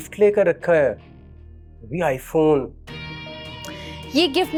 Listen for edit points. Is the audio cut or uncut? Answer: uncut